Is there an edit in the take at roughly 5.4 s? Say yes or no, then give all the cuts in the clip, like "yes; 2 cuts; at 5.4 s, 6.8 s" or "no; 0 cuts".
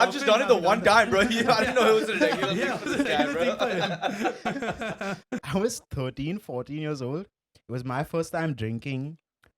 yes; 1 cut; at 5.4 s